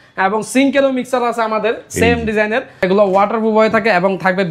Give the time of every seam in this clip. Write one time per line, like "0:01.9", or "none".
0:02.8